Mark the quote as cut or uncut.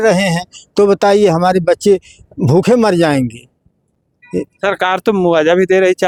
uncut